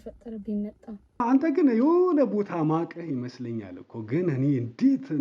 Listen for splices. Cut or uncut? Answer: cut